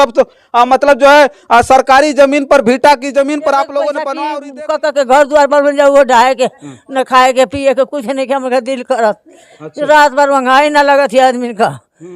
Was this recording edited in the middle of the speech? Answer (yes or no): yes